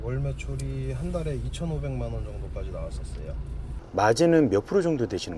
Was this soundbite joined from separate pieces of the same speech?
no; 0 cuts

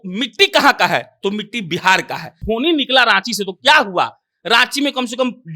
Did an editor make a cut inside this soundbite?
yes; 1 cut; at 2.4 s

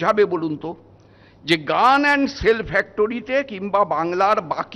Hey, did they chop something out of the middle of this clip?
no; 0 cuts

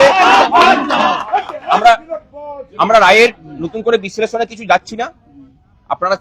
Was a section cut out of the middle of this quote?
no; 0 cuts

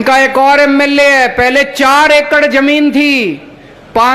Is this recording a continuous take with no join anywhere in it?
yes; 0 cuts

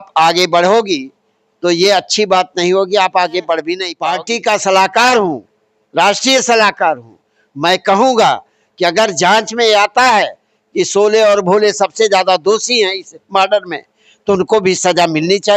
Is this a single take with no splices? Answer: no; 1 cut; at 3.8 s

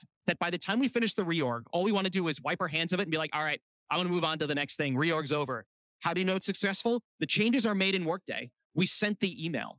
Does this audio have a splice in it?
yes; 1 cut; at 7.1 s

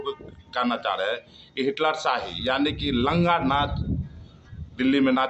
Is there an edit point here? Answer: no; 0 cuts

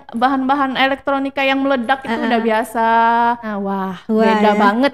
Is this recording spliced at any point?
yes; 1 cut; at 3.5 s

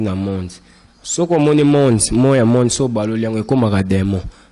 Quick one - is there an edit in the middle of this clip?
no; 0 cuts

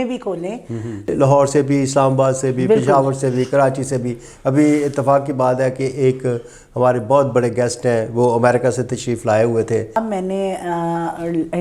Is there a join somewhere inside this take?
yes; 2 cuts; at 1.1 s, 10.0 s

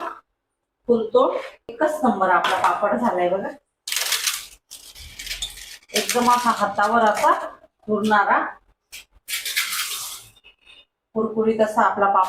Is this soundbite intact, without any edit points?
no; 1 cut; at 1.6 s

